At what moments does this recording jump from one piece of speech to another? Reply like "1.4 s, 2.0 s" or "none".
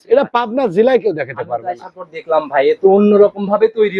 none